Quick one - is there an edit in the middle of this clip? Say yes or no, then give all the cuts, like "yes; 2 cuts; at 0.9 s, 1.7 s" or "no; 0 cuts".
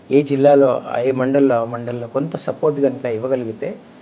no; 0 cuts